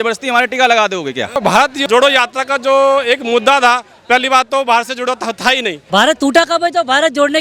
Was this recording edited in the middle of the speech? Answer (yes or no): yes